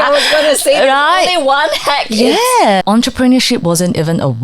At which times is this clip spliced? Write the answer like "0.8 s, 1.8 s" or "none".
2.8 s